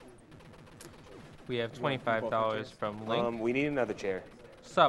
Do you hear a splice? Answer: yes; 1 cut; at 4.0 s

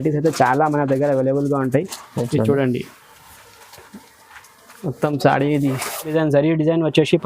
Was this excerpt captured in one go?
no; 1 cut; at 6.1 s

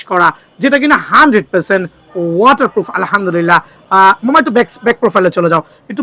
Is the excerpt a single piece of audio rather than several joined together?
yes; 0 cuts

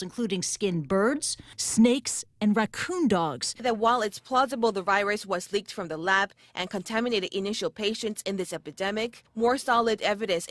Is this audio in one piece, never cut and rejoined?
yes; 0 cuts

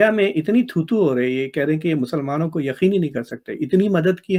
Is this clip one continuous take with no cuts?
yes; 0 cuts

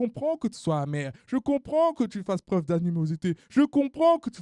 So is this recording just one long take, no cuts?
yes; 0 cuts

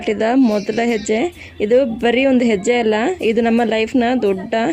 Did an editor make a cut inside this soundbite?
no; 0 cuts

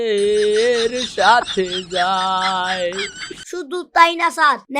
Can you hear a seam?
yes; 1 cut; at 3.4 s

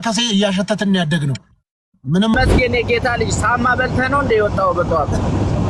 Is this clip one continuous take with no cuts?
no; 1 cut; at 2.3 s

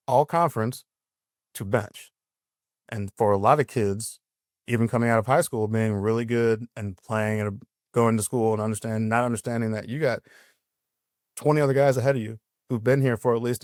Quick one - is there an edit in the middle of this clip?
no; 0 cuts

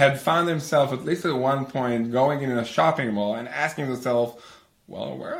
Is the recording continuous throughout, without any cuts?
yes; 0 cuts

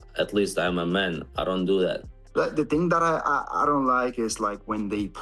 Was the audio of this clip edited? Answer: yes; 1 cut; at 2.2 s

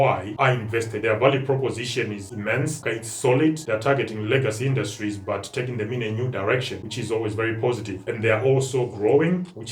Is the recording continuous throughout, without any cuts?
no; 1 cut; at 0.9 s

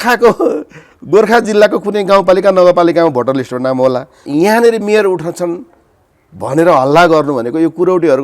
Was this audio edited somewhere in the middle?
yes; 1 cut; at 4.2 s

